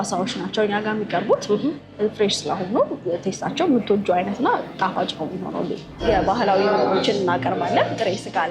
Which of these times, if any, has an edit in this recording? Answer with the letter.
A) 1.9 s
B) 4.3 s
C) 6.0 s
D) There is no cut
C